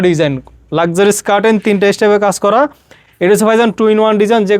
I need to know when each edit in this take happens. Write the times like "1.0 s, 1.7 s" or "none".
none